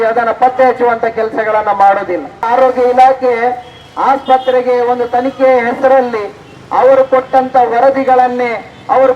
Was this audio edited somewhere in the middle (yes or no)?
yes